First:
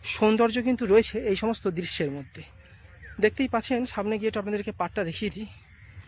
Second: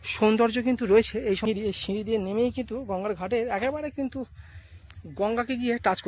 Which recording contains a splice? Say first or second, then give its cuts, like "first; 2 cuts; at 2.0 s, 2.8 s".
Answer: second; 1 cut; at 1.4 s